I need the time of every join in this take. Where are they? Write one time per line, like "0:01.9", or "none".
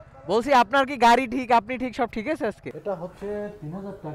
0:02.7